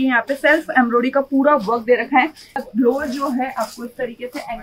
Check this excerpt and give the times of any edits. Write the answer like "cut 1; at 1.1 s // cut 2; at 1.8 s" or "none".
cut 1; at 2.5 s